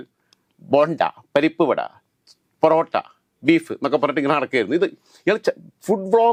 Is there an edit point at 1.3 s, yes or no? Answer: no